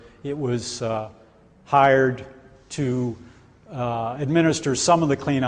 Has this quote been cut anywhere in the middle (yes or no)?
no